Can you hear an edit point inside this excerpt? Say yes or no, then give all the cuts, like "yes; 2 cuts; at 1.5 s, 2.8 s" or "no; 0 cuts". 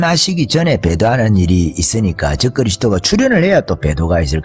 no; 0 cuts